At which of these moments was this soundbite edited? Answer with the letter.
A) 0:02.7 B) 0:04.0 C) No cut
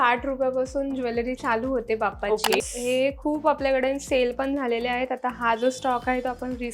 A